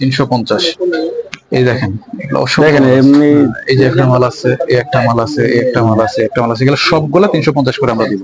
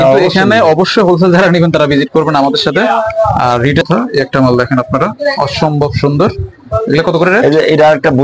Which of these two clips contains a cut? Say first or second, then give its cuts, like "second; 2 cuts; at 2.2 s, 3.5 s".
second; 1 cut; at 3.8 s